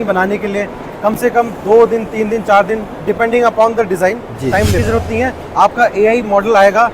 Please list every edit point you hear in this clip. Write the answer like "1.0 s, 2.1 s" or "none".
4.8 s